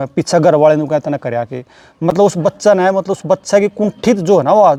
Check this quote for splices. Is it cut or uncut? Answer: uncut